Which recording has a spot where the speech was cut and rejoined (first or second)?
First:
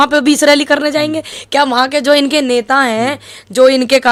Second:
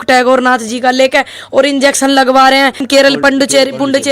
second